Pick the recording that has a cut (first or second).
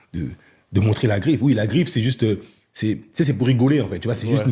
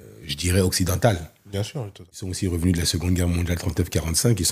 second